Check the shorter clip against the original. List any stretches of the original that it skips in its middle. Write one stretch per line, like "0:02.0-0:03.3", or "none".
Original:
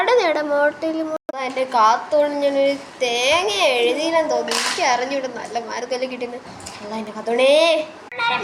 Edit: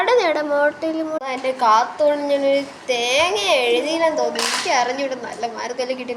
0:01.2-0:01.3

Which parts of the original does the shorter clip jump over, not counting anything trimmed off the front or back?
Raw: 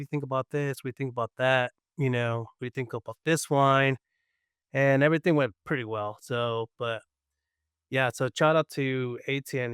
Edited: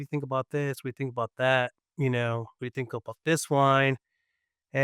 none

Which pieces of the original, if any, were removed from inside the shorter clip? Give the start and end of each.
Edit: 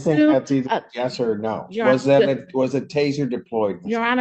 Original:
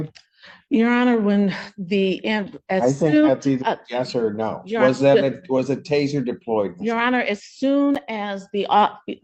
none

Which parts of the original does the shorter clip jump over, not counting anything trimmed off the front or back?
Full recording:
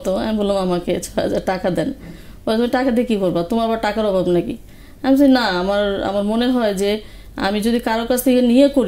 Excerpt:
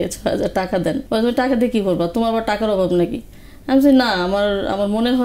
0:01.9-0:02.4

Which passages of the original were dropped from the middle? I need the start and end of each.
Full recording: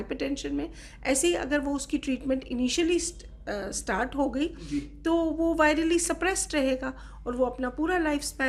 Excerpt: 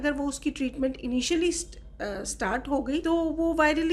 0:04.5-0:05.0

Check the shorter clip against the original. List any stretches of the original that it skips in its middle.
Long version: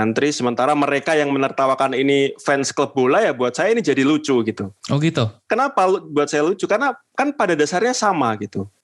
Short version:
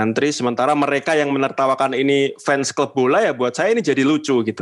none

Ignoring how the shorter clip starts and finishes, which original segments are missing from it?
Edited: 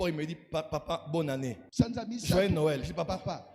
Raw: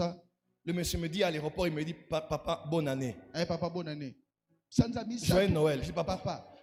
0:03.2-0:04.6

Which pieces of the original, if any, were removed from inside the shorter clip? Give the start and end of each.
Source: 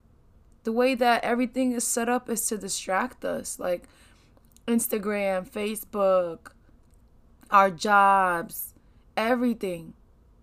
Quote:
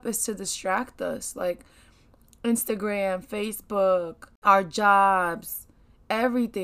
0:06.5-0:07.3

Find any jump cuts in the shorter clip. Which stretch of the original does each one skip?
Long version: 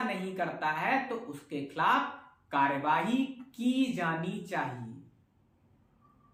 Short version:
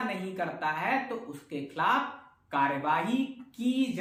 none

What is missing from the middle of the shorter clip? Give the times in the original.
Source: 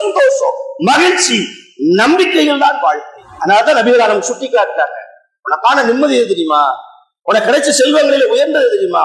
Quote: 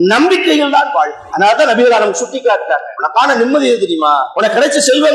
0:03.1-0:03.3
0:05.0-0:05.4
0:06.8-0:07.2

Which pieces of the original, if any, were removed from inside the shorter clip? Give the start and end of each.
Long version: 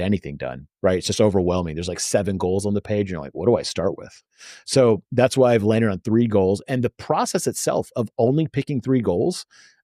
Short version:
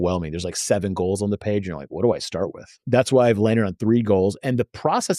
0:04.2-0:05.1

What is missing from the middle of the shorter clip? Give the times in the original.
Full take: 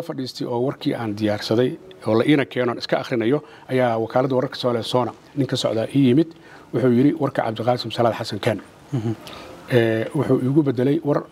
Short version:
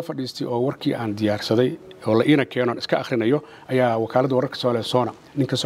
none

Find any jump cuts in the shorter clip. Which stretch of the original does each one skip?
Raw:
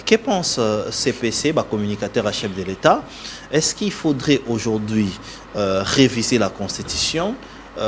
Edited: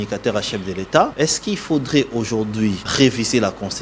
0:03.0-0:03.5
0:05.2-0:05.9

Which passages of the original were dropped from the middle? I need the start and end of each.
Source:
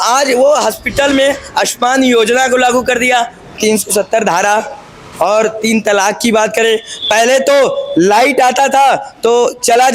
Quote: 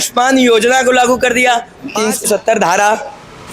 none

